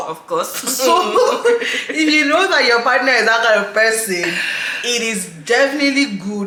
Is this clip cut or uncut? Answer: uncut